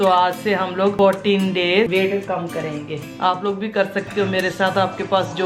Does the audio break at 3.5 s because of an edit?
no; 2 cuts; at 0.9 s, 1.9 s

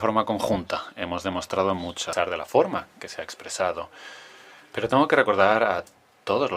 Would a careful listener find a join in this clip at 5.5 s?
no; 1 cut; at 2.0 s

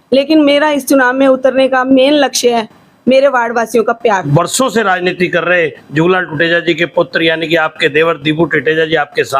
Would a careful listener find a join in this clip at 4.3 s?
yes; 1 cut; at 4.3 s

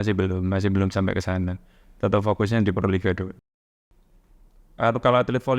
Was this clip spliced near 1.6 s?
no; 1 cut; at 3.5 s

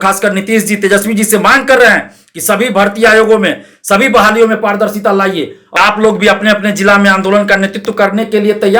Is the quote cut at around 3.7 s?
no; 1 cut; at 5.6 s

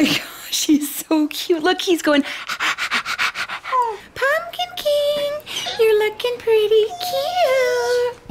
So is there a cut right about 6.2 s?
no; 1 cut; at 4.0 s

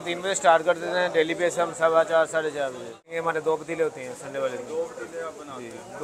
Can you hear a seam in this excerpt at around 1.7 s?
no; 1 cut; at 3.1 s

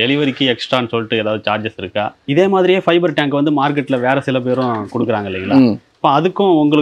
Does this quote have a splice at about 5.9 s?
no; 1 cut; at 2.1 s

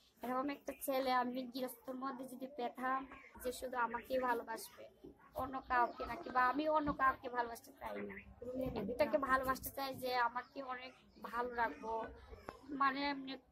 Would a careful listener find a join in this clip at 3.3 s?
yes; 1 cut; at 3.3 s

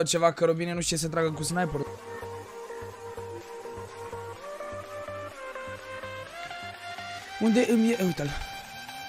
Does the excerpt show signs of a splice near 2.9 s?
no; 0 cuts

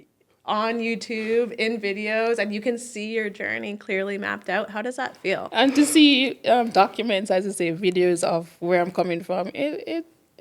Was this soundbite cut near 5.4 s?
yes; 1 cut; at 5.4 s

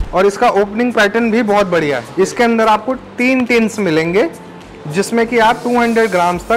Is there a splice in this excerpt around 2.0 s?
yes; 1 cut; at 2.0 s

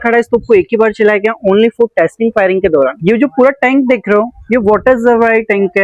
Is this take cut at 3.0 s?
yes; 1 cut; at 3.0 s

